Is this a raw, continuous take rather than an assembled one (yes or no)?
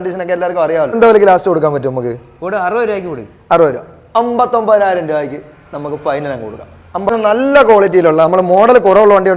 no